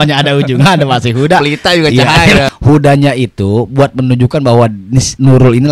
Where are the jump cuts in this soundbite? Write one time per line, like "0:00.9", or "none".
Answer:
0:02.5